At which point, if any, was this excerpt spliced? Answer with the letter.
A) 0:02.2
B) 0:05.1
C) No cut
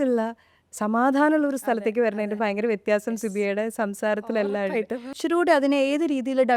B